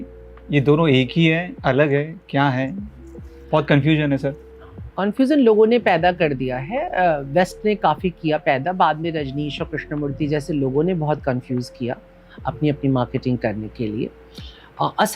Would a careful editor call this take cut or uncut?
uncut